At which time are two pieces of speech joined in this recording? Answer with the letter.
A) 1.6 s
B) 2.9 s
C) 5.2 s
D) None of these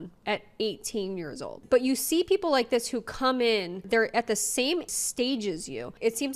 A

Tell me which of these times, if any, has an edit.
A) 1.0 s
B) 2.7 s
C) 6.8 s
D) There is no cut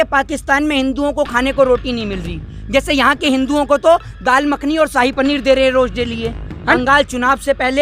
C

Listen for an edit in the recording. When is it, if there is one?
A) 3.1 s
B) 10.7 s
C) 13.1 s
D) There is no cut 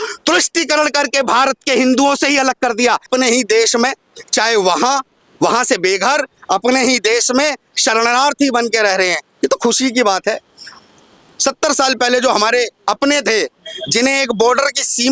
A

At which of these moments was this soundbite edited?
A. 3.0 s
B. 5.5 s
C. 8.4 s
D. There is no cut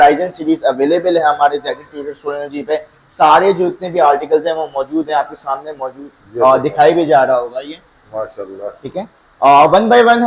D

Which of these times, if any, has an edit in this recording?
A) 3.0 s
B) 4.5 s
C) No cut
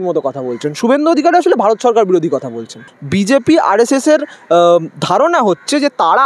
A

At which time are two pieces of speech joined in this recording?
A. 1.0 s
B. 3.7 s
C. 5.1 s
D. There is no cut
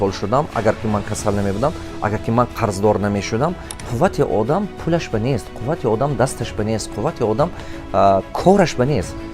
B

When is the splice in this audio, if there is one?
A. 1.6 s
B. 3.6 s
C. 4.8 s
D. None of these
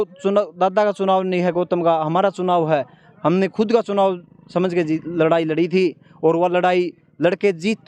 D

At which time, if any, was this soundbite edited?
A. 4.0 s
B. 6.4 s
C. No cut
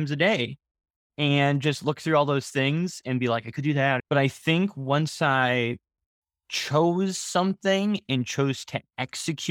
A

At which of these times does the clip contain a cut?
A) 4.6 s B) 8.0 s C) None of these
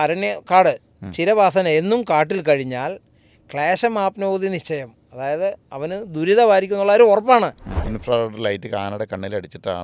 B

